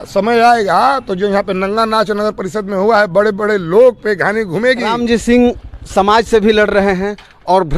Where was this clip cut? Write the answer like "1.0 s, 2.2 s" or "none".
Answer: 4.9 s